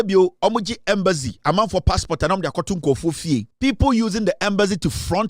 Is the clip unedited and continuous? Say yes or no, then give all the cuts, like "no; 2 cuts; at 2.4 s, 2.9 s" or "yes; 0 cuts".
no; 1 cut; at 3.5 s